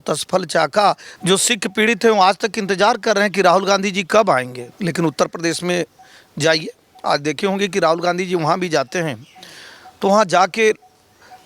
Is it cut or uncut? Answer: cut